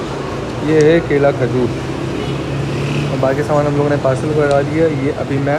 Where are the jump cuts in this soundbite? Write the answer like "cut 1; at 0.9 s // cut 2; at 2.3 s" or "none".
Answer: none